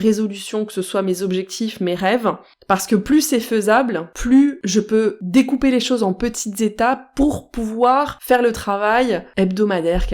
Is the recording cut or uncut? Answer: cut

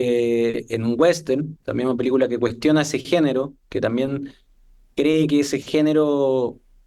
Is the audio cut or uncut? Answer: cut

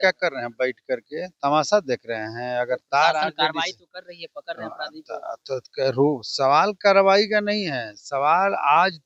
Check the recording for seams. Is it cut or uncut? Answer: uncut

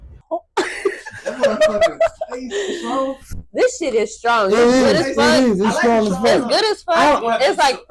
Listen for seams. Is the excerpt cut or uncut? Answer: uncut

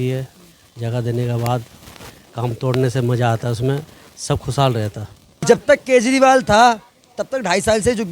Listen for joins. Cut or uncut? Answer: cut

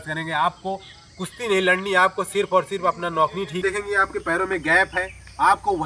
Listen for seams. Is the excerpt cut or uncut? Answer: cut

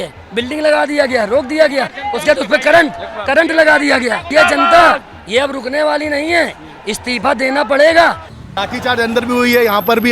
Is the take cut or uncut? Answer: cut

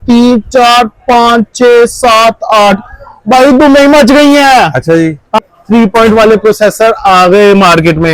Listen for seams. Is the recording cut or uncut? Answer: cut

